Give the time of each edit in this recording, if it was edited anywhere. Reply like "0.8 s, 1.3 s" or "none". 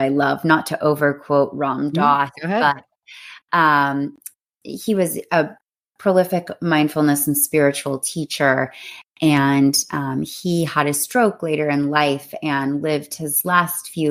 none

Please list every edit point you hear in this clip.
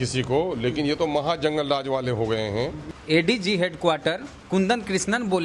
2.9 s

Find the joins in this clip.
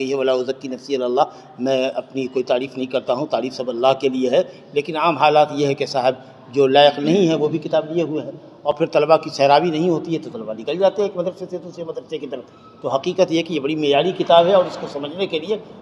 none

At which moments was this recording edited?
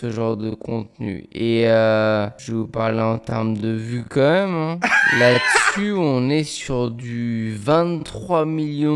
2.4 s

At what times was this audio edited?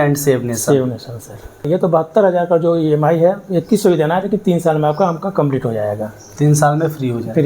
1.6 s

